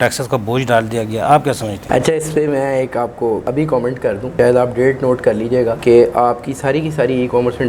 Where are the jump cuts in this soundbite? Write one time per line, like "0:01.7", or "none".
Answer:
none